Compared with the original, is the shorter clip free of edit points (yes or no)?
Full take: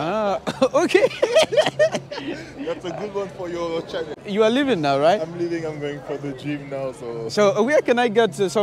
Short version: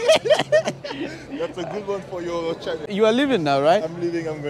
no